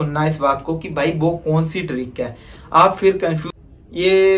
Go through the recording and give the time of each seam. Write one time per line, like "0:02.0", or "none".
0:03.4